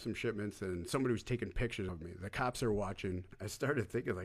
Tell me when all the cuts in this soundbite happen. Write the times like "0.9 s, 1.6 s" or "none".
2.0 s, 3.3 s